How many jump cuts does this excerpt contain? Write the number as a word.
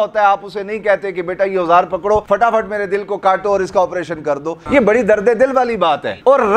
two